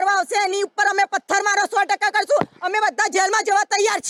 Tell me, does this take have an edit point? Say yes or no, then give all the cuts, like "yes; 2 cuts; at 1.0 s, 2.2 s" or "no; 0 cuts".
no; 0 cuts